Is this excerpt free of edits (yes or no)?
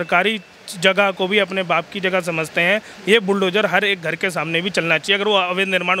yes